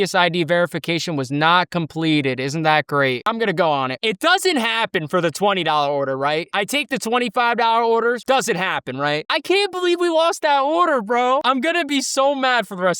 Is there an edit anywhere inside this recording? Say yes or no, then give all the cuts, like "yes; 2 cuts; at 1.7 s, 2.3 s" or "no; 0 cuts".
yes; 2 cuts; at 3.3 s, 9.3 s